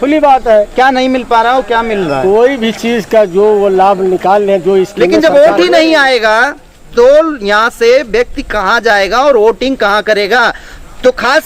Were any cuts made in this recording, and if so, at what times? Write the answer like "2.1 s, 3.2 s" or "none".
5.0 s